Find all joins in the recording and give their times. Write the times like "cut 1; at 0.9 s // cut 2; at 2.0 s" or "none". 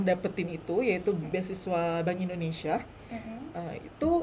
cut 1; at 1.3 s